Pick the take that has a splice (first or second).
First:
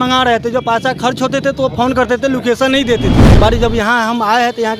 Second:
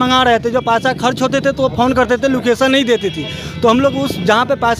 first